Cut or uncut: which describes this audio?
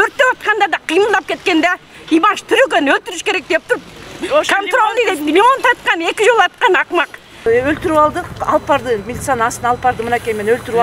cut